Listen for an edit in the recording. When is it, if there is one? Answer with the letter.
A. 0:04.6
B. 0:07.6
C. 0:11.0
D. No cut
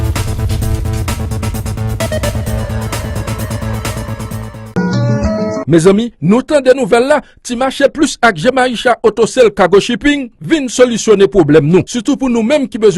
A